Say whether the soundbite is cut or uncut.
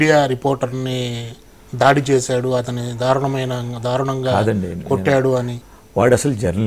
cut